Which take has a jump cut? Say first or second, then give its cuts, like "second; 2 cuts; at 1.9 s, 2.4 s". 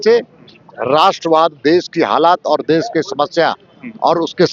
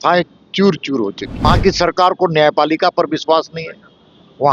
second; 1 cut; at 1.5 s